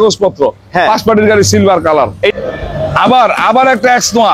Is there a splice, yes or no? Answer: yes